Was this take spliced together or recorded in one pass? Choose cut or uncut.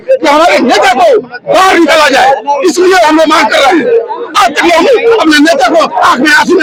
uncut